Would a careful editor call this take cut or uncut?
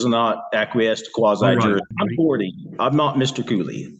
cut